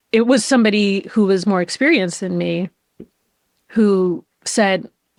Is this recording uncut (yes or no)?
yes